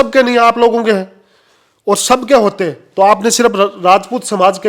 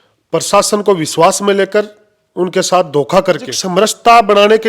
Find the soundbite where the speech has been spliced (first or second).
second